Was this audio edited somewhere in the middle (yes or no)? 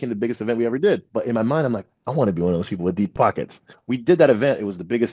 yes